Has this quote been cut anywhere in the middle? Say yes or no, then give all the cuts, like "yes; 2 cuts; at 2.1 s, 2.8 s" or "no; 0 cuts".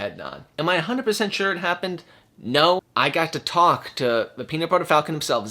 yes; 1 cut; at 2.8 s